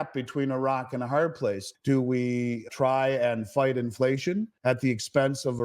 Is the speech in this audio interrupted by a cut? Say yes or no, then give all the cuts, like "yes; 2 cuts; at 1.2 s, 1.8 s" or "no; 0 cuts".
yes; 1 cut; at 4.5 s